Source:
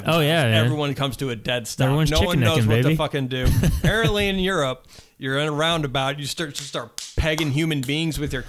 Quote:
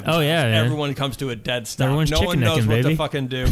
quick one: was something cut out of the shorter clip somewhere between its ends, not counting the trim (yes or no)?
no